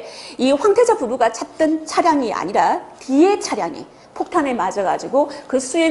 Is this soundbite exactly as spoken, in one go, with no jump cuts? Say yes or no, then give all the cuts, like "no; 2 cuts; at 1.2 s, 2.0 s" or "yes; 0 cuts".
yes; 0 cuts